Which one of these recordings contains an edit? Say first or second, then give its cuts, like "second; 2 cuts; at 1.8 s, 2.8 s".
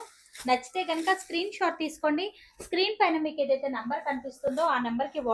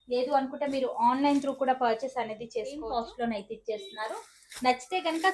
second; 1 cut; at 2.8 s